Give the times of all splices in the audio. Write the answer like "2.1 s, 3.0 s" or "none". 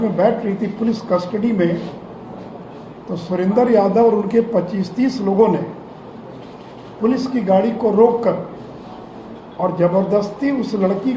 none